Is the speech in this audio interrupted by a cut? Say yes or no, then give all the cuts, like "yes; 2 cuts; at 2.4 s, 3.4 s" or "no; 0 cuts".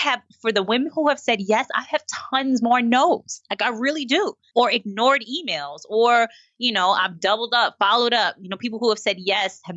yes; 1 cut; at 4.5 s